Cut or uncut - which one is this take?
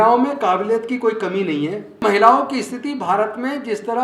cut